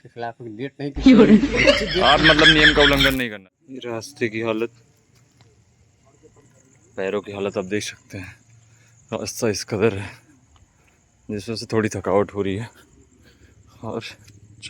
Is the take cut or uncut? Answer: cut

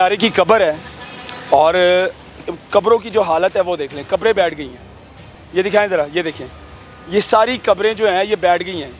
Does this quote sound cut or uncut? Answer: cut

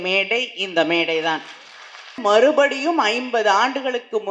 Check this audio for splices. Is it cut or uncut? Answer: cut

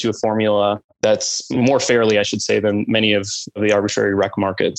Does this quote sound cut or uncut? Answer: cut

